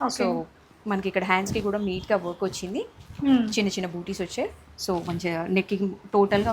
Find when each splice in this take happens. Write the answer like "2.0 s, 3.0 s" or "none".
none